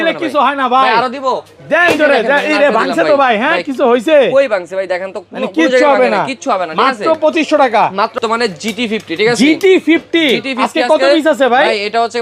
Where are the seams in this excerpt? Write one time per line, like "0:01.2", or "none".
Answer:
0:08.2